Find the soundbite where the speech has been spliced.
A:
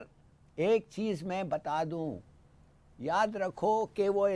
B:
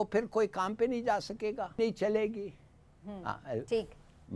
B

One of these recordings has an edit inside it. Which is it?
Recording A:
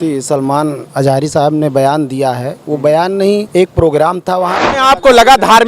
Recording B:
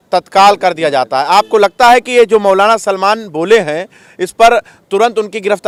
A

